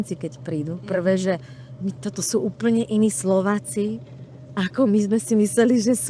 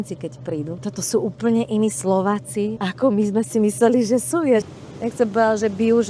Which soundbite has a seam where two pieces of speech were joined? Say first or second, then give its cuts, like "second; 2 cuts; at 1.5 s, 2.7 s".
second; 3 cuts; at 0.8 s, 2.8 s, 4.6 s